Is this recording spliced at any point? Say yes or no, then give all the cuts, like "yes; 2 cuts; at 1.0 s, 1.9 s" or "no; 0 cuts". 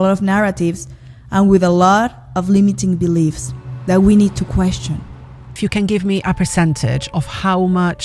yes; 1 cut; at 5.5 s